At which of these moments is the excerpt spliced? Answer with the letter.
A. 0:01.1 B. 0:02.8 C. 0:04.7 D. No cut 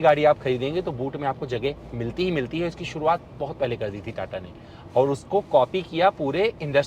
D